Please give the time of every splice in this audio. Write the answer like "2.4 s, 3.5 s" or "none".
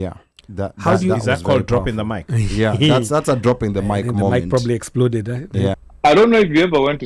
5.8 s